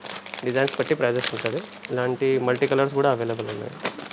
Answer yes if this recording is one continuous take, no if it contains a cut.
no